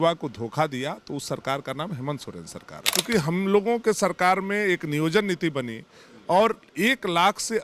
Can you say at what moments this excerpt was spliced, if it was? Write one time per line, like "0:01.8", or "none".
0:03.0